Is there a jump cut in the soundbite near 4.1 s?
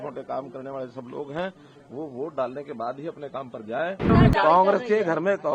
yes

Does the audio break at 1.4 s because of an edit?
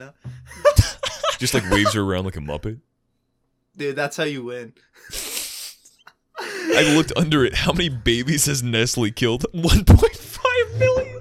yes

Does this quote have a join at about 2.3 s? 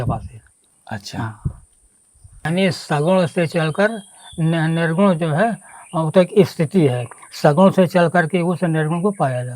yes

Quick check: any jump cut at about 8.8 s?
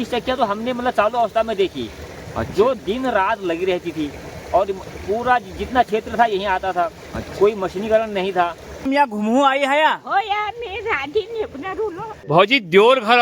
yes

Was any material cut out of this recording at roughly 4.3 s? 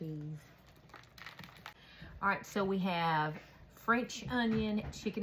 no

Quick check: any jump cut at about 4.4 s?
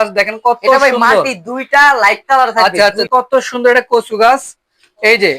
no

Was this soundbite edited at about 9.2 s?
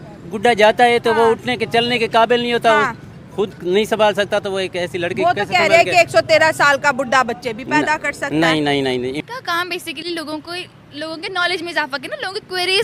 yes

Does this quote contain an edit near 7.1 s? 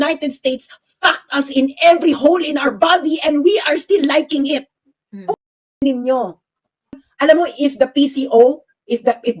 yes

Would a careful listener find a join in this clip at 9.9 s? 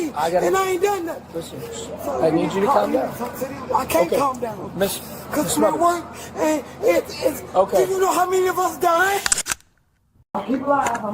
yes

